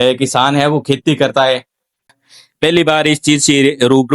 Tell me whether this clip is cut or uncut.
cut